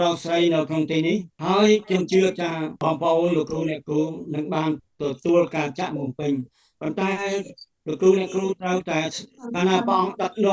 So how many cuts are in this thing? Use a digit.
2